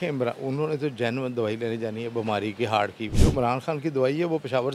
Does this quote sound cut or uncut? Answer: uncut